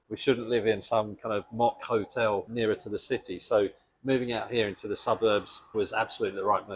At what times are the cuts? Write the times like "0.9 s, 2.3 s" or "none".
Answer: 2.5 s, 5.6 s